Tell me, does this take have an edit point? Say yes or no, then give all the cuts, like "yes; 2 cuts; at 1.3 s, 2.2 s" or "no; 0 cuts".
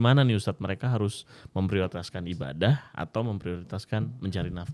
no; 0 cuts